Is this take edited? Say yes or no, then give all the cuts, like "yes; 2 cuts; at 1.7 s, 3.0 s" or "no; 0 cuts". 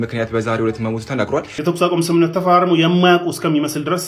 yes; 1 cut; at 1.5 s